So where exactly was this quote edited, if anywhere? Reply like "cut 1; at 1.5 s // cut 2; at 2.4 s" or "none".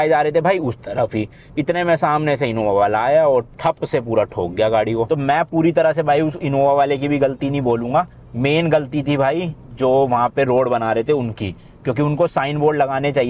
none